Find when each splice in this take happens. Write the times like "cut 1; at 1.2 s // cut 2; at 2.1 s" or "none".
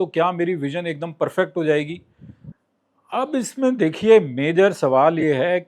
cut 1; at 2.5 s